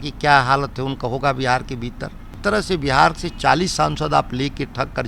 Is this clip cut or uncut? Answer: cut